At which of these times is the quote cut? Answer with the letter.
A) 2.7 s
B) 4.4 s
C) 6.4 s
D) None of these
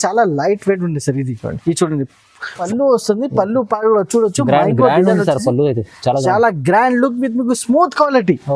A